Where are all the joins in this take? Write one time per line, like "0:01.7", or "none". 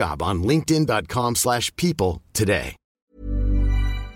0:02.8